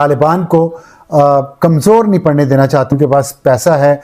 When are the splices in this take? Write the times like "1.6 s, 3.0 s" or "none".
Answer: 2.9 s